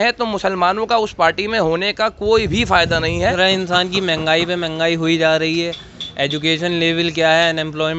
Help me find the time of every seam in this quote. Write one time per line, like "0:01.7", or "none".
0:03.3